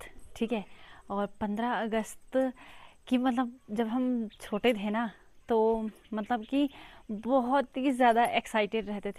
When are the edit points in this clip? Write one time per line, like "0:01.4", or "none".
none